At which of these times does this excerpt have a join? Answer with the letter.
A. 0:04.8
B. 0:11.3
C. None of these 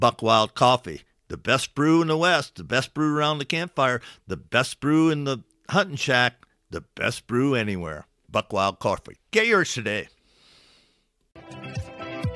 B